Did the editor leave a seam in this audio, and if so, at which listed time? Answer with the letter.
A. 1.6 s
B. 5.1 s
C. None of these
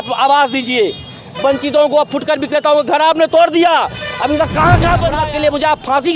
B